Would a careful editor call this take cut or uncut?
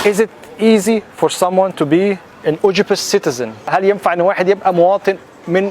cut